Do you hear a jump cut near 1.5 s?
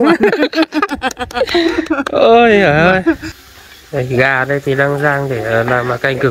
no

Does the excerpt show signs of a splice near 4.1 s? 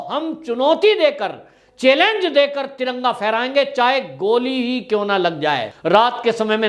no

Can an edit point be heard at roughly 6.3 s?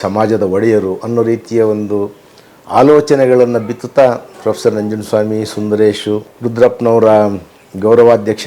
yes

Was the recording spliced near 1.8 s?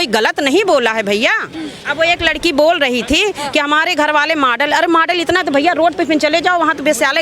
yes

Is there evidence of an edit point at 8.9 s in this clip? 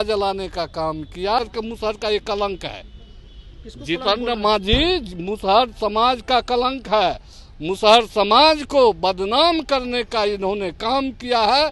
no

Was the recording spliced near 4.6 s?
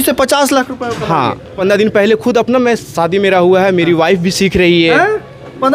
no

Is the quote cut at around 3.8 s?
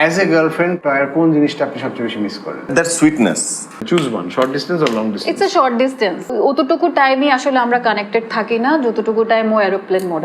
yes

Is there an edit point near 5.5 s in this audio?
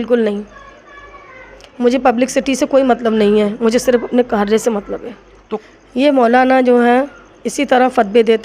yes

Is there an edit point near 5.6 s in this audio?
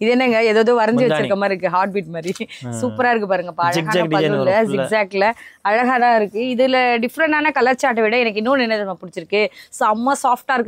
no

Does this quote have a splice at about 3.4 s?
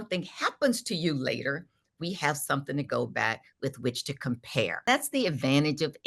no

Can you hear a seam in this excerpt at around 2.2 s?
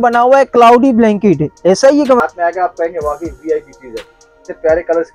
yes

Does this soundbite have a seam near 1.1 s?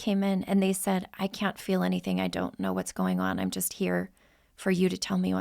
yes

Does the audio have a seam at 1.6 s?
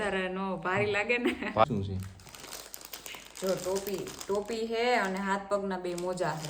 yes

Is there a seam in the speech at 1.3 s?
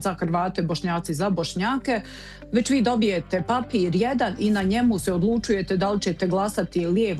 no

